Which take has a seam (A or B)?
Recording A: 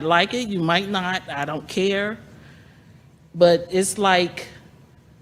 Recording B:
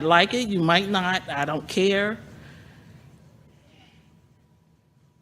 B